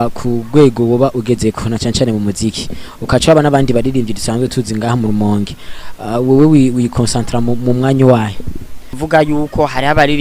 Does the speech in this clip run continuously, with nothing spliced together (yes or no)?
no